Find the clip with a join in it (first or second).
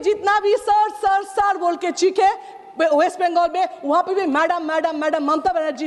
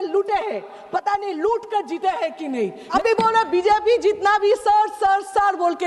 second